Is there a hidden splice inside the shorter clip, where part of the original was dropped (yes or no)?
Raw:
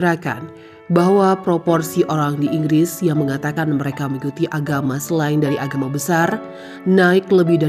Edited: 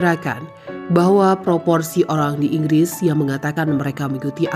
no